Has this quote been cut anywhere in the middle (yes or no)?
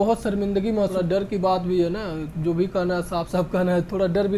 yes